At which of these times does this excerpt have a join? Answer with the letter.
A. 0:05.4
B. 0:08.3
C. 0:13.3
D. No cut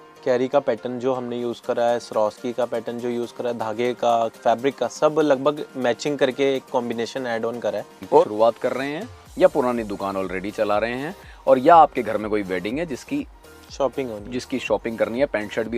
B